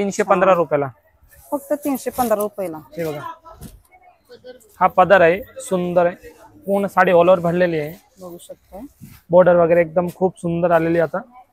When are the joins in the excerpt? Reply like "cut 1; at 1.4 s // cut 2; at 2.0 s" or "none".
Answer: none